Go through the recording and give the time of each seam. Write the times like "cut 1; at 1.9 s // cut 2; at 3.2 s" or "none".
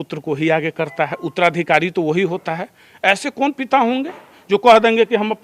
none